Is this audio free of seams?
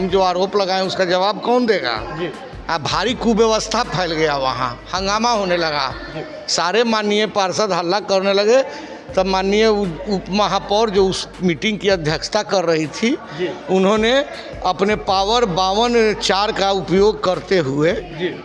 yes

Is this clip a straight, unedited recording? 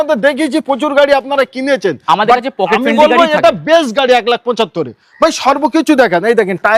yes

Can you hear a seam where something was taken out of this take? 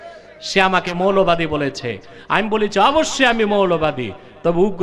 no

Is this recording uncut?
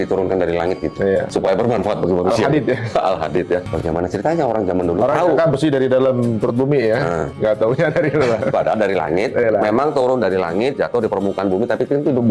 yes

